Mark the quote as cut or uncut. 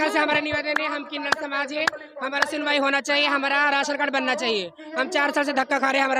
uncut